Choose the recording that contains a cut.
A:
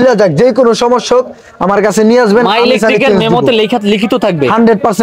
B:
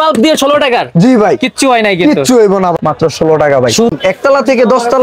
B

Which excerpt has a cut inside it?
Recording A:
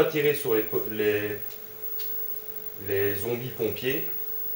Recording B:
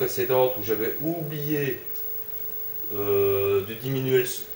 A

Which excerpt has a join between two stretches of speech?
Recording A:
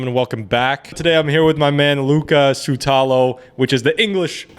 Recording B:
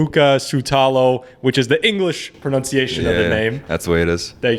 A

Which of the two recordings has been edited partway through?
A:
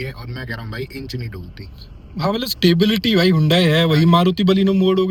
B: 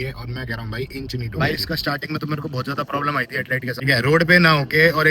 B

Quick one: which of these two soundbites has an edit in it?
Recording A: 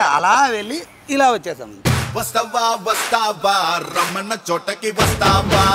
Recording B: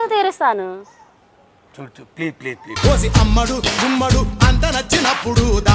A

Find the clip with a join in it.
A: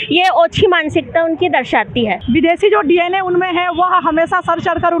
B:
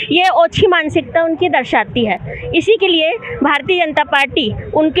A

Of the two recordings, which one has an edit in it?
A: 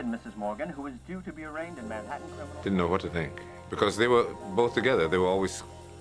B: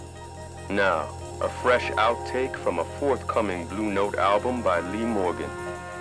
B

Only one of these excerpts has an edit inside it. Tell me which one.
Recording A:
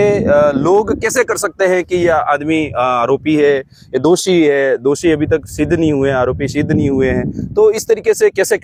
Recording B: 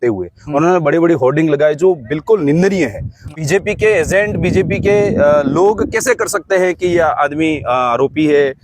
B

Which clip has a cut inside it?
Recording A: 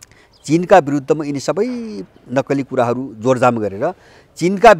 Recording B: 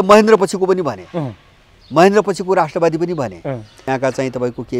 B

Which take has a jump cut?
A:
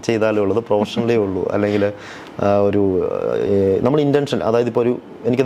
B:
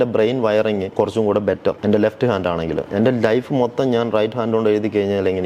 B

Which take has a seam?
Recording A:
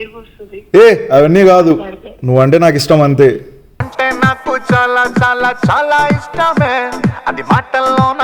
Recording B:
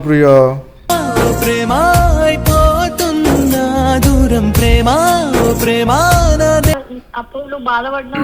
B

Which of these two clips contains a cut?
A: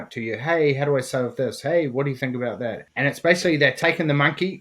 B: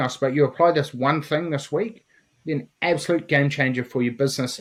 A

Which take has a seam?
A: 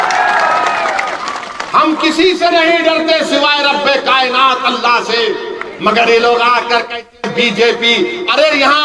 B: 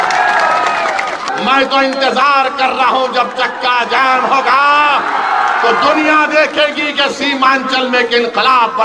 B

